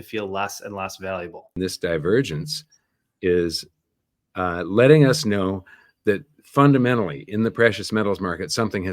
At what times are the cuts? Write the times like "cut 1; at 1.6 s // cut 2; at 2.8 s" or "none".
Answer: cut 1; at 1.5 s